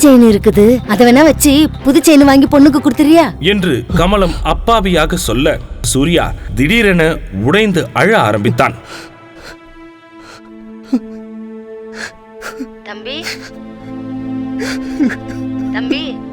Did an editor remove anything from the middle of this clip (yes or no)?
no